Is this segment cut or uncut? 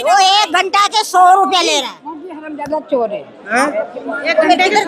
uncut